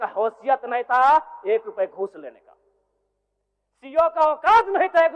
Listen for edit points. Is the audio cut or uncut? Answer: uncut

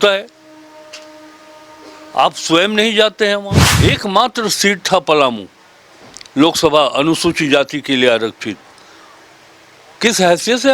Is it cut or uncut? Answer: cut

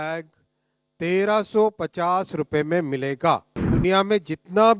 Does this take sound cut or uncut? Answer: cut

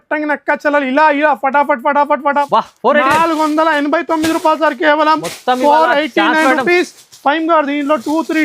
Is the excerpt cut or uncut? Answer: cut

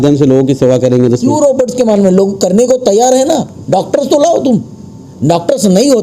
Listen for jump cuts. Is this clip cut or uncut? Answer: uncut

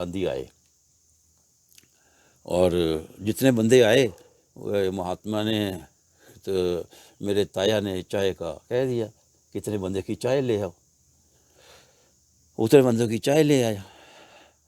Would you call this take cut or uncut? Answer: uncut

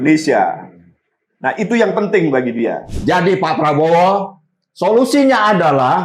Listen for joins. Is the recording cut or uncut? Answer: cut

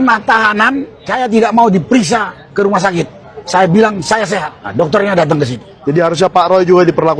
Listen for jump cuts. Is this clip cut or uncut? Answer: cut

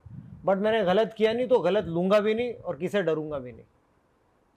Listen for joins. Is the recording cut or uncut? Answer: uncut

